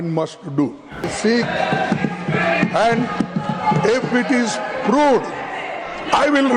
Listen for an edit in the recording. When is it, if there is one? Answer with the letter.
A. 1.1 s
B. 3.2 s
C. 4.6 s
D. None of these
A